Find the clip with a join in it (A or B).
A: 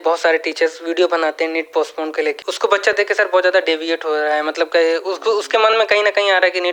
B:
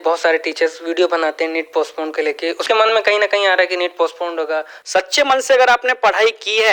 B